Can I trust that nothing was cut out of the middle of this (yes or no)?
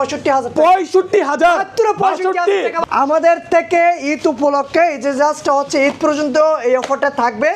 no